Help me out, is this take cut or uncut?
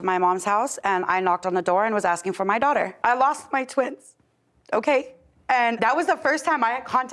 cut